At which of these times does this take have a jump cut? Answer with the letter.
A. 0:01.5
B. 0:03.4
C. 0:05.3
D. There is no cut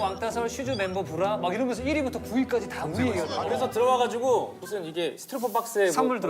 B